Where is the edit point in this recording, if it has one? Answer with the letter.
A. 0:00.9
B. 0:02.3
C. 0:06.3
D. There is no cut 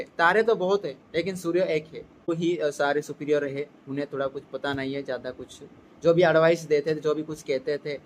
B